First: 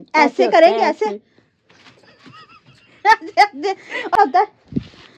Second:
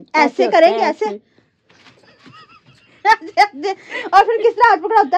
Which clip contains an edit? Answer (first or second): first